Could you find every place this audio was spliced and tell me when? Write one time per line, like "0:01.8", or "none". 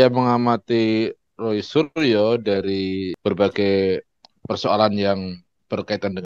0:03.1